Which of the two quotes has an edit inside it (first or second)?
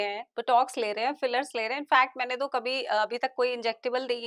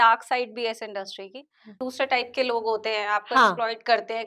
second